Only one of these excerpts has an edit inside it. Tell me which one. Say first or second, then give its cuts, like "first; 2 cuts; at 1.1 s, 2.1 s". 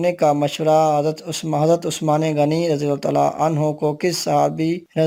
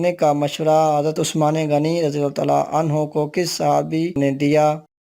second; 2 cuts; at 1.2 s, 4.2 s